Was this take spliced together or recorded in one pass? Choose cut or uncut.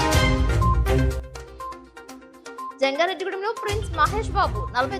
cut